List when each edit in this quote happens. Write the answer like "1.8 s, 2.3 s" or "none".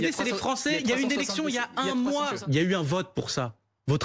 0.8 s, 2.4 s